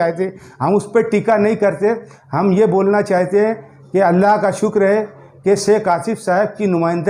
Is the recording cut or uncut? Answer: uncut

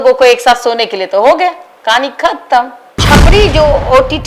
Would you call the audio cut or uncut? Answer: cut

